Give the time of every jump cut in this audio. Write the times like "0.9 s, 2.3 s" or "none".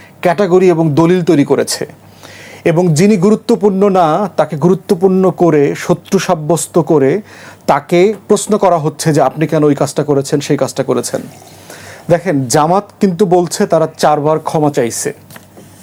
none